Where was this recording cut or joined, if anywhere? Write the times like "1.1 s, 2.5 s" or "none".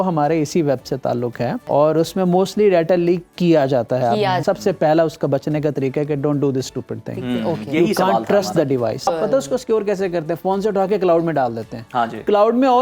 1.6 s, 4.4 s, 9.1 s